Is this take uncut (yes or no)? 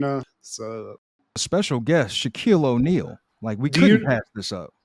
no